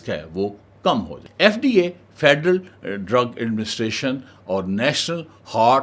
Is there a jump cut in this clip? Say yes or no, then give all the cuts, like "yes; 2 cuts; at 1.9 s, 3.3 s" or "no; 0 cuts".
yes; 1 cut; at 1.2 s